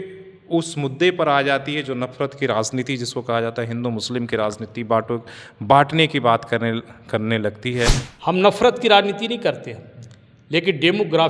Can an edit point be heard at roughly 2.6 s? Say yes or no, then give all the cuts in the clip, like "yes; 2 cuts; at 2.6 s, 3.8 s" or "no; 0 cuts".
no; 1 cut; at 8.1 s